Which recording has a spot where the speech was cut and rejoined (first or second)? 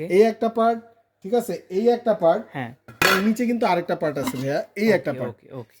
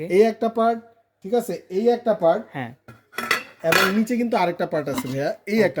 first